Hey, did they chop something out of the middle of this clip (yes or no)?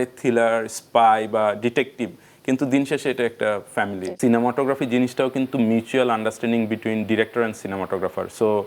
yes